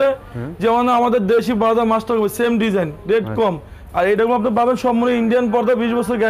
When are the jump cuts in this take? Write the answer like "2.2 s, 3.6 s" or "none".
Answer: none

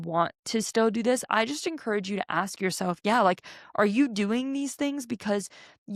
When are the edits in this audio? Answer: none

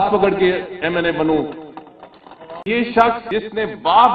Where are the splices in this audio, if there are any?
2.7 s, 3.2 s

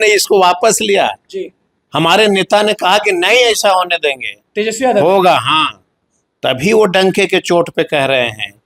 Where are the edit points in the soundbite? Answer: none

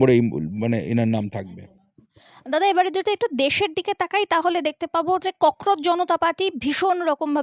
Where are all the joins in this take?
none

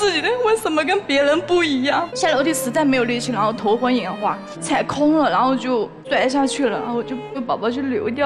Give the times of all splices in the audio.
2.1 s, 4.5 s, 6.0 s, 7.3 s

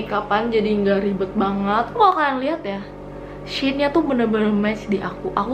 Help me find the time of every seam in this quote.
1.9 s

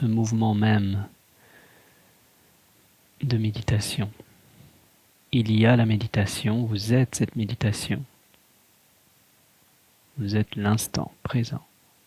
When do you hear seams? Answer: none

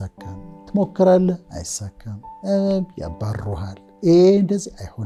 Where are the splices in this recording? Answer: none

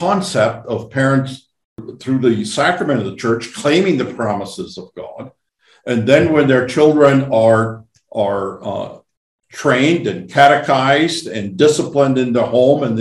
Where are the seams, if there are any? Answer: 1.9 s

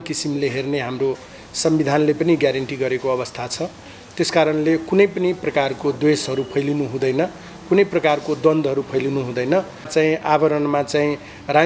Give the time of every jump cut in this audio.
9.9 s

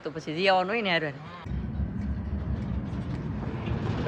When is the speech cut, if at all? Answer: 1.5 s

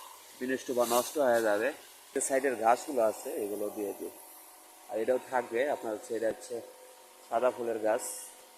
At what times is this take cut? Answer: 2.2 s

